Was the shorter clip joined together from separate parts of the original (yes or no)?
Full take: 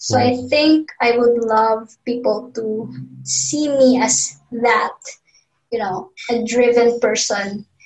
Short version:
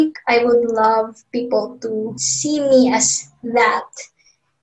yes